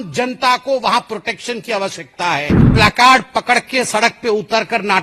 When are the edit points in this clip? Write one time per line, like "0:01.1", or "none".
0:02.7